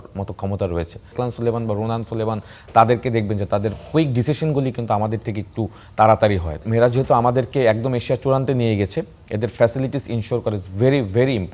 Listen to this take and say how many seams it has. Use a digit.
2